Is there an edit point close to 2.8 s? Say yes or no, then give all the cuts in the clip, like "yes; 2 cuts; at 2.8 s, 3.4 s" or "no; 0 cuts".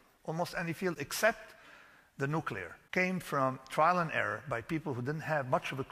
yes; 1 cut; at 2.8 s